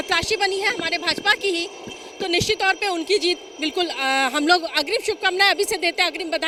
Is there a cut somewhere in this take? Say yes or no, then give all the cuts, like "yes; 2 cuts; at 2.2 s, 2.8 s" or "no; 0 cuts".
no; 0 cuts